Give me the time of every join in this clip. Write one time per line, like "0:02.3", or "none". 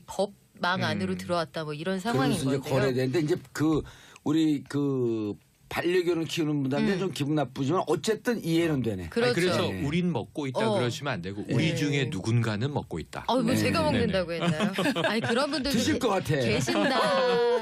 none